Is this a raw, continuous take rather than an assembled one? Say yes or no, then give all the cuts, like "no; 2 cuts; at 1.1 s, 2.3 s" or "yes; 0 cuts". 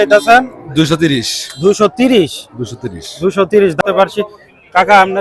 no; 1 cut; at 3.8 s